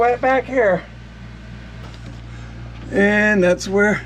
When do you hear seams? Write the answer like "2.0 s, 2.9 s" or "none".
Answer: 1.9 s

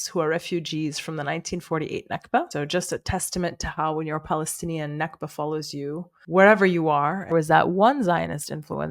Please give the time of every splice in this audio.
7.3 s

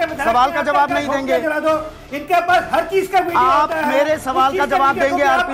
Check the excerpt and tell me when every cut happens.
none

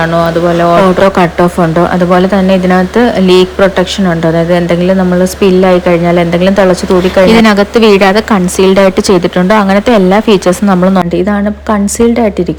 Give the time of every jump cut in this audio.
11.0 s

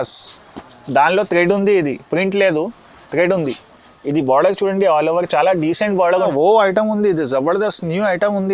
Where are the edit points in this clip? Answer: 6.2 s

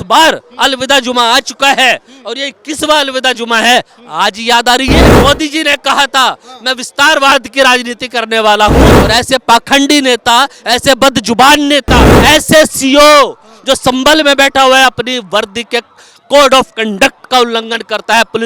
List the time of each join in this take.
5.1 s, 8.9 s, 12.1 s

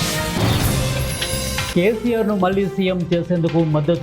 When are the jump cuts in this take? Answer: 1.7 s

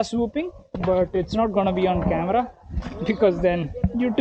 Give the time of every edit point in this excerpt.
none

